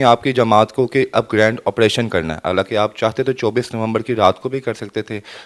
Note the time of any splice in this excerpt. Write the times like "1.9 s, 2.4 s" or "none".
none